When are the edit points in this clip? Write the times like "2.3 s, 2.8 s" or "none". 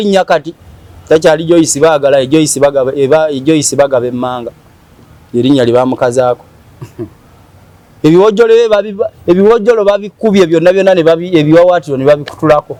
none